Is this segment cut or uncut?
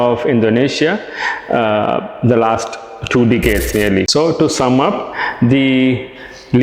cut